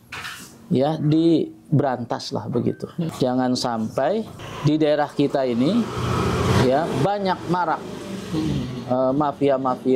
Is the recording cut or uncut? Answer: cut